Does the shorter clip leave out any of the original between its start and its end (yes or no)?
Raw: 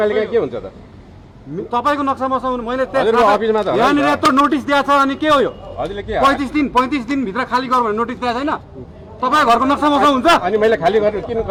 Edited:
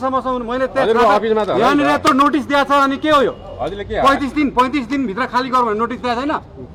no